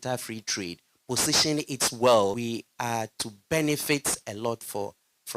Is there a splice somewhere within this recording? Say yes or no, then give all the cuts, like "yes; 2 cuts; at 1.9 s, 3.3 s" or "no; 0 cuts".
yes; 1 cut; at 2.4 s